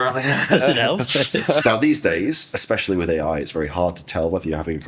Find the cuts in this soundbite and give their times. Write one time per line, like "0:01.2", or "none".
0:01.6